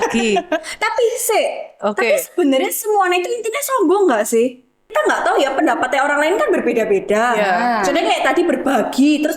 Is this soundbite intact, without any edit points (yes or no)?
no